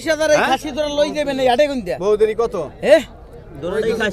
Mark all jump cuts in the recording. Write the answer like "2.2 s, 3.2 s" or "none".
none